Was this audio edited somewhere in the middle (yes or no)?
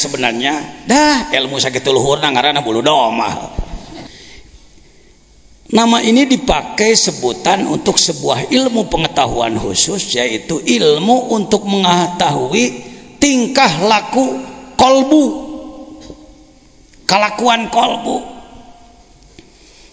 yes